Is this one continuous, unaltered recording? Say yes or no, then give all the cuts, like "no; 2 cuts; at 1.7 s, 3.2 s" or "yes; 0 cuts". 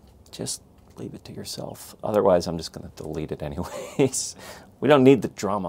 yes; 0 cuts